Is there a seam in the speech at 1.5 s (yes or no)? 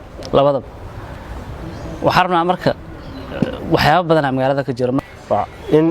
no